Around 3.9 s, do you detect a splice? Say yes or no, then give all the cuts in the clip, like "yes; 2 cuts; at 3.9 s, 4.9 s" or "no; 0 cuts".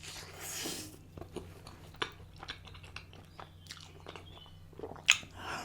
no; 1 cut; at 1.9 s